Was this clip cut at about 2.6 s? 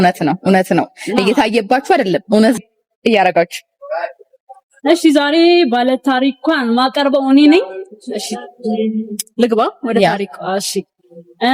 yes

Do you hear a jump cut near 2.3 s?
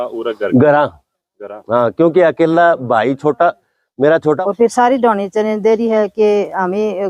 no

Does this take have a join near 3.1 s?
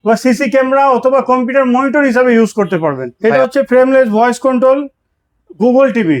yes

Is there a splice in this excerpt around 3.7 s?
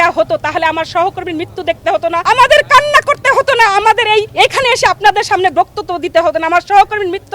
no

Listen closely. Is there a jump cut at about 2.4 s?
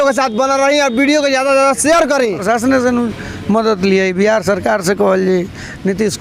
yes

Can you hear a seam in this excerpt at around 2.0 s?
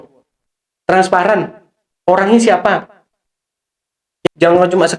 no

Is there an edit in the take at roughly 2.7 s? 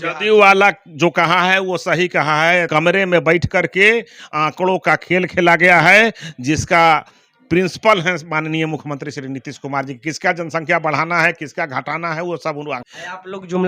yes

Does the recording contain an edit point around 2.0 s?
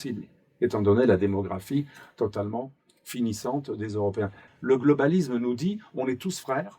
no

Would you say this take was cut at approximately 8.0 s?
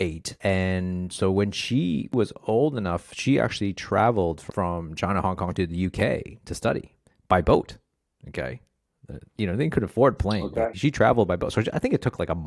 no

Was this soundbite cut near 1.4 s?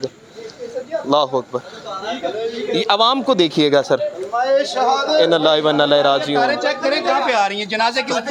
no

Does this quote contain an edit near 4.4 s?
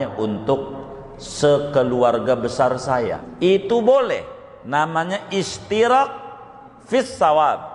no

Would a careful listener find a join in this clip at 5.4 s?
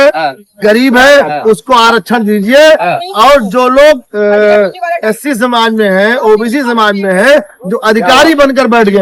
no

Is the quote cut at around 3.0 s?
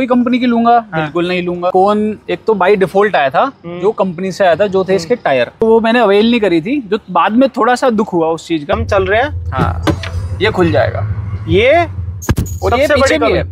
no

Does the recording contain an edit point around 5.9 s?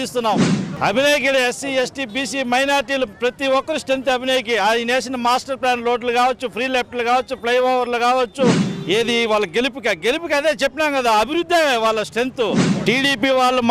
no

